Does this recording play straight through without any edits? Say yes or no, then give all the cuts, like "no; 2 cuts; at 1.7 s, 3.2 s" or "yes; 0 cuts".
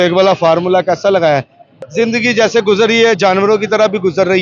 no; 1 cut; at 1.8 s